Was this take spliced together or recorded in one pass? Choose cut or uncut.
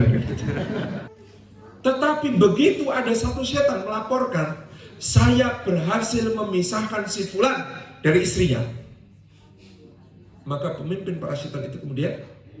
cut